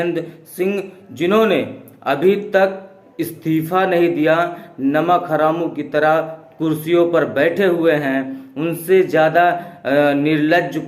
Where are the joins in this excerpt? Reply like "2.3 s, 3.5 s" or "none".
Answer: none